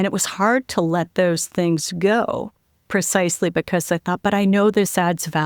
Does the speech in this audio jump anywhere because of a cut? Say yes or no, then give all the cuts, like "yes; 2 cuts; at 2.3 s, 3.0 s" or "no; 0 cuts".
no; 0 cuts